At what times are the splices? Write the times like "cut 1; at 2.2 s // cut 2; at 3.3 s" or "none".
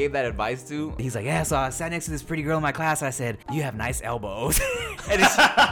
cut 1; at 1.0 s // cut 2; at 3.4 s